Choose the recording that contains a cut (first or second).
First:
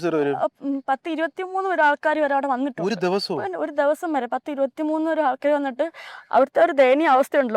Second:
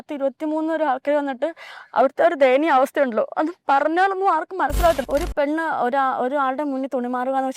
second